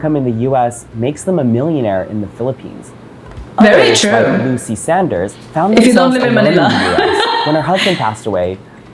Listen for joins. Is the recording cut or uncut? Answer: uncut